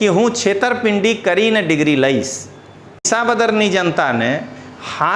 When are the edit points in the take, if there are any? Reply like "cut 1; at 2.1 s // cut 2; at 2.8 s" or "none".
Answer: cut 1; at 3.1 s